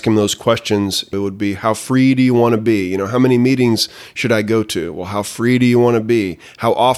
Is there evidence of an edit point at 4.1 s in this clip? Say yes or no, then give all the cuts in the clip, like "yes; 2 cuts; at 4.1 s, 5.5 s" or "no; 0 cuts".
no; 1 cut; at 1.1 s